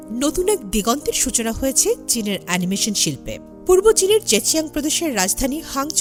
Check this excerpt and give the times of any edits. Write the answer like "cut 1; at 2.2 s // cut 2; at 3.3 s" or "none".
none